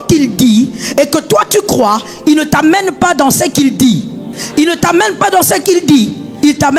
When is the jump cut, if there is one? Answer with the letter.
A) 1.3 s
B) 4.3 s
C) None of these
B